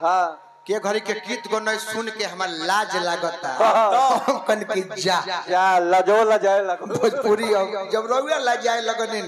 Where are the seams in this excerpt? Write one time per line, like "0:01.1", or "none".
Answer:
none

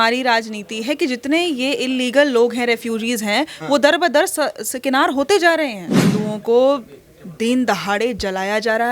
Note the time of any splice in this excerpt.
0:06.0

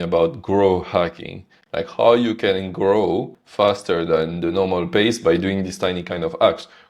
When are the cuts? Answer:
0:03.4

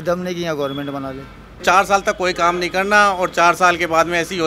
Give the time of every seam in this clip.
0:01.6

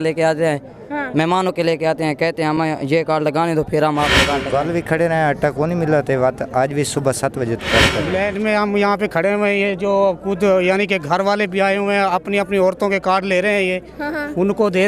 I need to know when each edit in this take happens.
0:04.4
0:08.0

